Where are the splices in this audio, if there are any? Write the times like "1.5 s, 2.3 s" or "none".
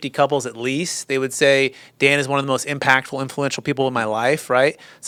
none